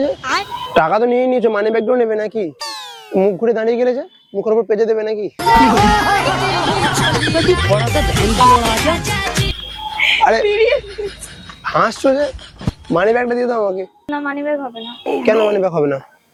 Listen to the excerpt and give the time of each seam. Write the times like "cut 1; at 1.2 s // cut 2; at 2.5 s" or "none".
none

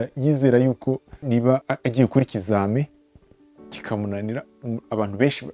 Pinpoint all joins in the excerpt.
cut 1; at 1.7 s

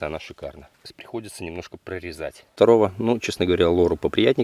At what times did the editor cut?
cut 1; at 1.0 s // cut 2; at 2.5 s

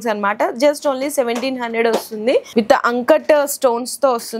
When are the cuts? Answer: cut 1; at 2.5 s

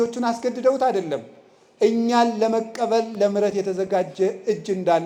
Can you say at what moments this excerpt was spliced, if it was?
none

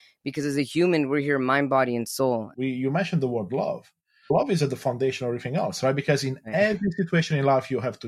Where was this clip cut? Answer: cut 1; at 2.5 s // cut 2; at 4.3 s

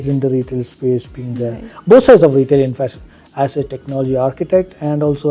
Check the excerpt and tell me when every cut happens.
none

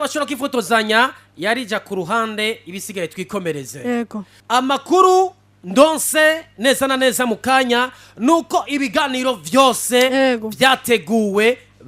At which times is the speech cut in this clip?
cut 1; at 4.3 s

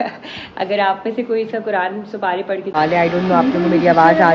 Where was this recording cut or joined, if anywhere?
cut 1; at 2.8 s

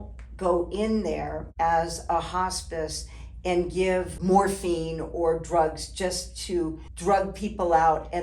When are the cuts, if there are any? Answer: cut 1; at 1.4 s // cut 2; at 4.1 s // cut 3; at 6.9 s

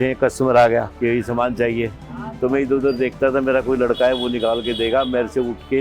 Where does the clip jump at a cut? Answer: cut 1; at 0.9 s

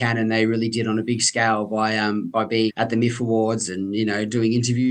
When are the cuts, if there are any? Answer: cut 1; at 2.7 s

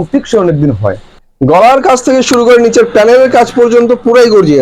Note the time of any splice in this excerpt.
cut 1; at 1.1 s

